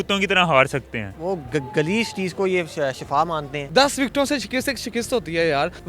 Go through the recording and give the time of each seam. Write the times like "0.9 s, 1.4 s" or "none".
1.1 s, 3.6 s